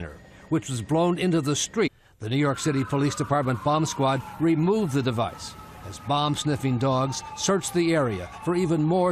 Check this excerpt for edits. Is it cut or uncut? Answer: uncut